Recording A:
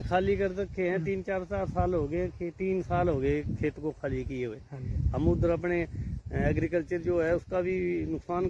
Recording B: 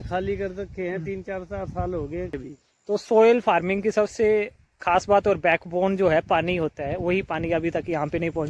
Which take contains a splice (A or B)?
B